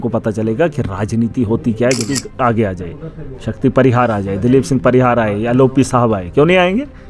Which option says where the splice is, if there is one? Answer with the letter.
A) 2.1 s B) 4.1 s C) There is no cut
A